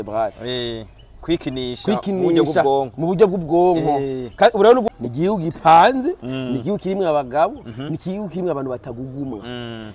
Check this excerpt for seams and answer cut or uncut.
cut